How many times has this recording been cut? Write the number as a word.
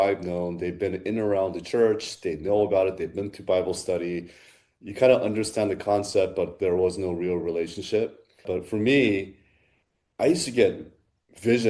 one